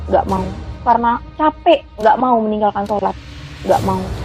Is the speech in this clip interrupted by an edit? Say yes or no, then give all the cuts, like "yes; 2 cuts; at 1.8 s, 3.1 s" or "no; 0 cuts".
yes; 1 cut; at 1.9 s